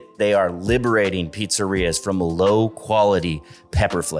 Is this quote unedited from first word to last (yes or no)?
yes